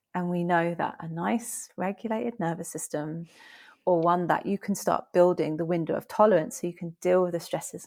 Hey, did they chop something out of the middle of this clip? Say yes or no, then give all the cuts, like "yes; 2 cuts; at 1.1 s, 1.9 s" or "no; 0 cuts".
no; 0 cuts